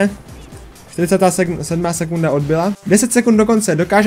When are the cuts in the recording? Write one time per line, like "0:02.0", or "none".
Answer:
0:02.8